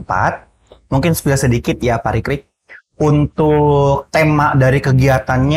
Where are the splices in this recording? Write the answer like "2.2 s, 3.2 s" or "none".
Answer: none